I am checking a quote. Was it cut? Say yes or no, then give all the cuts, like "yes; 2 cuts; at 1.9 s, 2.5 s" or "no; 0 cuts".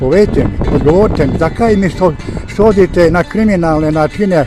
no; 0 cuts